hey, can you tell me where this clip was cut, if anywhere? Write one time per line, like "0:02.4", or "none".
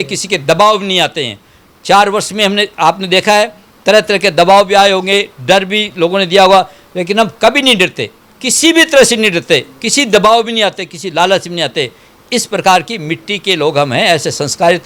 none

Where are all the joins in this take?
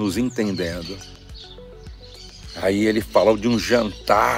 0:01.1
0:02.5

